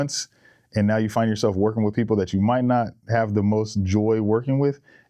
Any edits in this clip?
no; 0 cuts

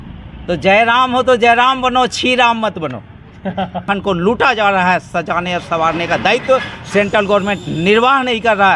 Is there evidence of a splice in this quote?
yes; 1 cut; at 3.8 s

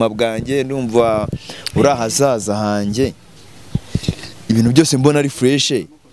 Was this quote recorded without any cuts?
yes; 0 cuts

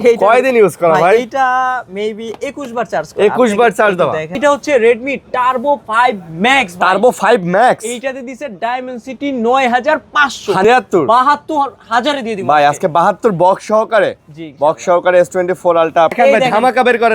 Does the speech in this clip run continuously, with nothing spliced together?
no; 3 cuts; at 4.4 s, 10.6 s, 16.1 s

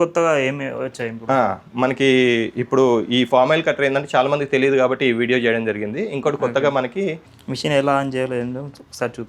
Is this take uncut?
no; 1 cut; at 7.3 s

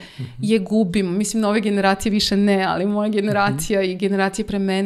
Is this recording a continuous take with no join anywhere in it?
yes; 0 cuts

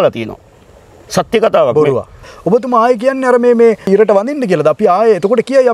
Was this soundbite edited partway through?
yes; 2 cuts; at 2.3 s, 3.9 s

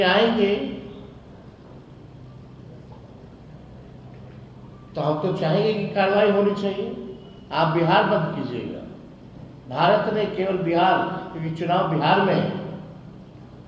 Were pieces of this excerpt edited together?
no; 0 cuts

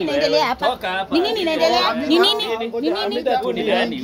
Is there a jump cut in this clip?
no; 0 cuts

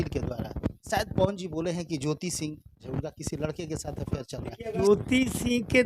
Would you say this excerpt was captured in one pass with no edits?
no; 3 cuts; at 0.8 s, 2.9 s, 4.9 s

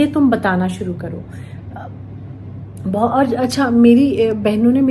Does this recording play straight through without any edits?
no; 1 cut; at 2.7 s

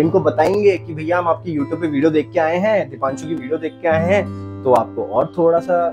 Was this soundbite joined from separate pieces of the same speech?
no; 0 cuts

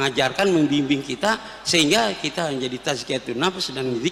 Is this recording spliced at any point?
no; 0 cuts

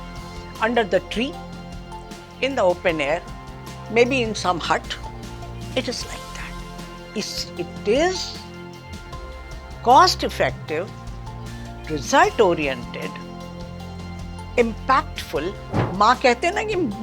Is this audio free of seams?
no; 1 cut; at 15.9 s

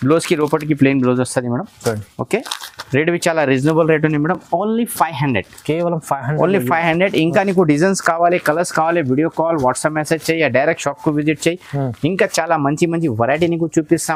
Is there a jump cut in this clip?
no; 0 cuts

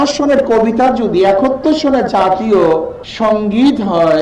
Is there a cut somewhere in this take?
yes; 1 cut; at 3.0 s

